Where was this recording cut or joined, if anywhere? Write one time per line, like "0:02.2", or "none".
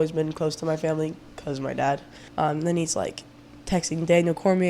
0:02.2